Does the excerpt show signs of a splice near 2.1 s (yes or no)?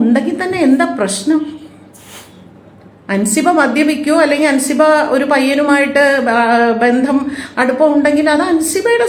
no